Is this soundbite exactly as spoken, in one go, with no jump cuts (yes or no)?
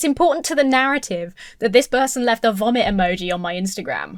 yes